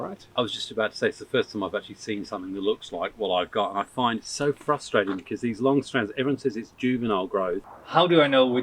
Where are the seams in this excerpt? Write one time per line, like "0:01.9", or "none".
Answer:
0:07.7